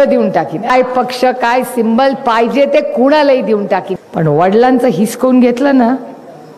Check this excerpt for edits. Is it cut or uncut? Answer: cut